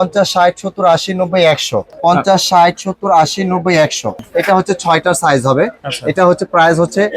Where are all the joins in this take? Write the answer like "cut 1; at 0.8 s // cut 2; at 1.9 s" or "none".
cut 1; at 1.9 s // cut 2; at 4.2 s